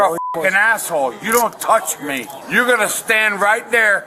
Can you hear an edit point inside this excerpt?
yes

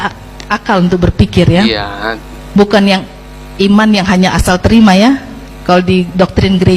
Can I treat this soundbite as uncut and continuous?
yes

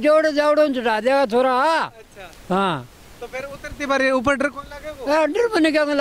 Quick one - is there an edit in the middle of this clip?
no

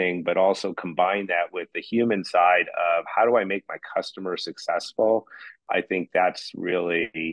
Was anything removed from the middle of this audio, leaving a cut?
yes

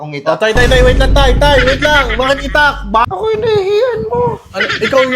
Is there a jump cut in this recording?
yes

